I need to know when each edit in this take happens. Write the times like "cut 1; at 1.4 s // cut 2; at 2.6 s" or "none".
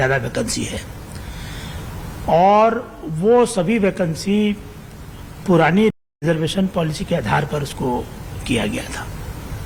none